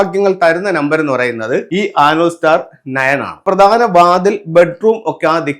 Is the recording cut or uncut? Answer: cut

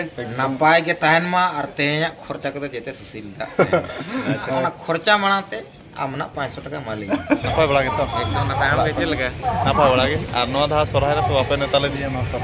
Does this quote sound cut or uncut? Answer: cut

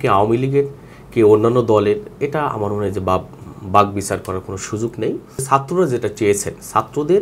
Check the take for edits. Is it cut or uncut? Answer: cut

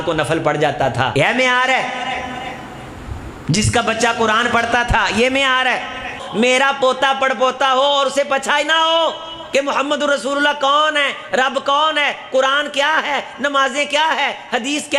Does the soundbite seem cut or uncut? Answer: cut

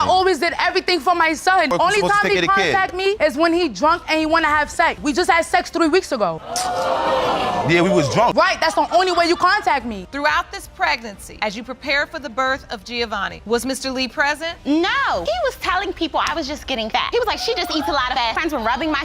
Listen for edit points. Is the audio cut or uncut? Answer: cut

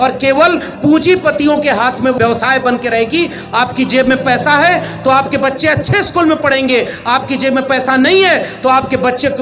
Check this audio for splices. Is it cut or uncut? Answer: cut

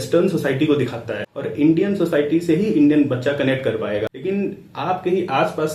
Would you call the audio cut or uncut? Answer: uncut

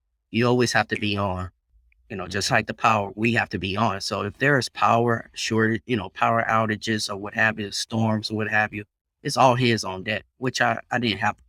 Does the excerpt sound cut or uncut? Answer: uncut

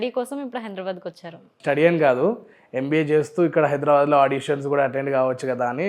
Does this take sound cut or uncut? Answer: cut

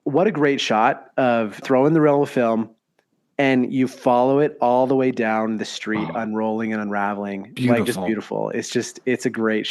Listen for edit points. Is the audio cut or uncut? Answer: cut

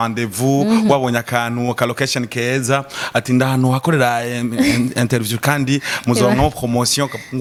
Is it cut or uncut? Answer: uncut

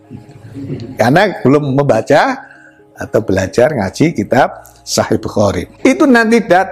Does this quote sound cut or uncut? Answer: cut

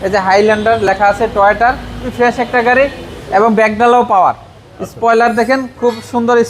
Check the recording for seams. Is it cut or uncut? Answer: cut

